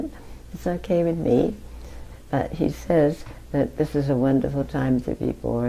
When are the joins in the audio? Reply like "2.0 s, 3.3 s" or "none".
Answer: none